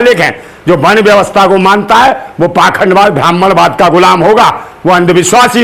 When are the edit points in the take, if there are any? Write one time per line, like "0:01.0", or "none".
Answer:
none

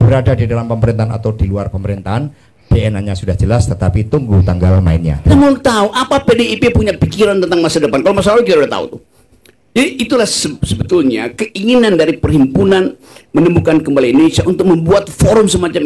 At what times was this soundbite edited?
0:05.3

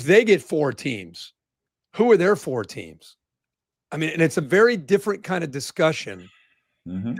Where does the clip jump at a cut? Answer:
none

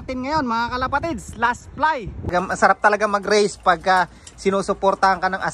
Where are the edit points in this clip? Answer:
0:02.3

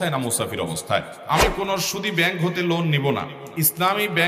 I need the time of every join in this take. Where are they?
0:01.1
0:03.4

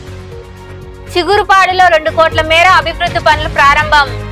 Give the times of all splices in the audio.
0:01.1

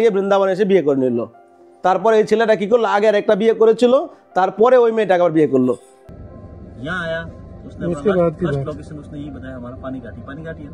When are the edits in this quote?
0:05.9

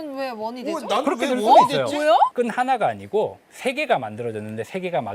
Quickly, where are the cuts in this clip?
0:02.3

